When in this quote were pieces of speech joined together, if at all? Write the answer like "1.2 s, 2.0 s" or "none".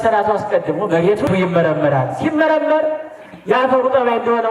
1.3 s